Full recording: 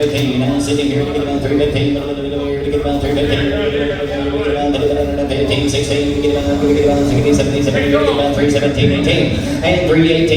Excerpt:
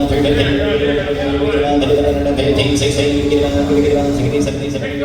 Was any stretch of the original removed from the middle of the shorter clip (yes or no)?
no